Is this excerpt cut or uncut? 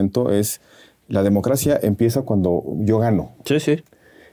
uncut